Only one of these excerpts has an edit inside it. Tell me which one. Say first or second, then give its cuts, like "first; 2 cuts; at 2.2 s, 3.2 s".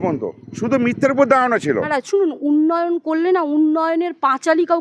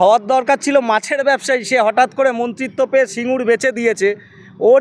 first; 1 cut; at 2.0 s